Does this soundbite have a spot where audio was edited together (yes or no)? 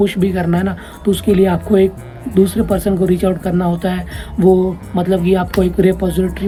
no